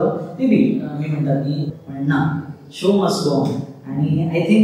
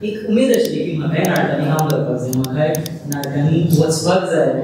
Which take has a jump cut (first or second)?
first